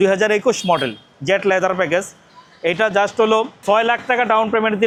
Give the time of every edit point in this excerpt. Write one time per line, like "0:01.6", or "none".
none

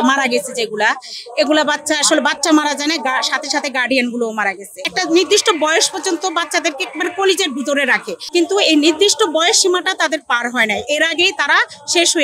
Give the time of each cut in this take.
0:04.8
0:08.2

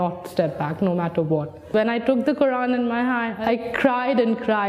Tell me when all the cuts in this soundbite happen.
0:03.3

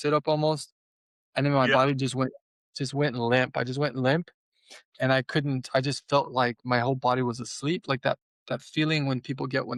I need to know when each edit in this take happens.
none

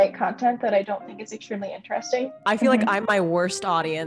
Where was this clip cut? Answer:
0:02.4

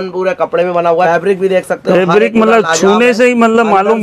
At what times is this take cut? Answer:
0:01.1

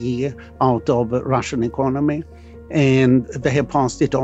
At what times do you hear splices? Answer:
0:03.2

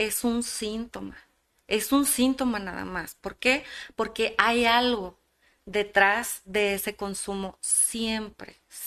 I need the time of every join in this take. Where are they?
none

